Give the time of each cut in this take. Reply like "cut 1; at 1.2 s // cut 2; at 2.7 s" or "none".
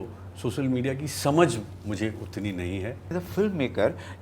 cut 1; at 3.1 s